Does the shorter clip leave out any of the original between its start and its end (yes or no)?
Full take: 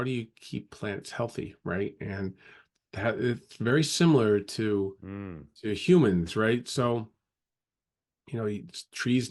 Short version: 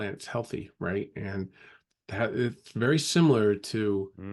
no